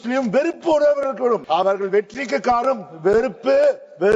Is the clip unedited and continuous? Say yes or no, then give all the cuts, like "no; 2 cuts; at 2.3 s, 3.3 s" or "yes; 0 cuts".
no; 1 cut; at 1.4 s